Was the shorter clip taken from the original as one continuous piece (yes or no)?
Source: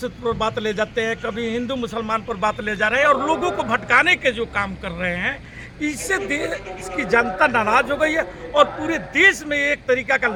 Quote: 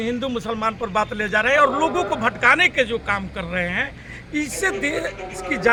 yes